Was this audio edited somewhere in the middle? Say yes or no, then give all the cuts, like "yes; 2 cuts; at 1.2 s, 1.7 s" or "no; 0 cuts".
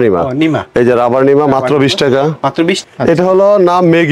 yes; 1 cut; at 2.9 s